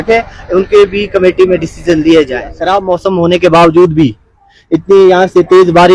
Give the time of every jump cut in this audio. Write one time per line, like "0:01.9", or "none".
0:02.6